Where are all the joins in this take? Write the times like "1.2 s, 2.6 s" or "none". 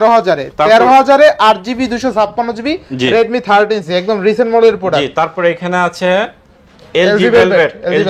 none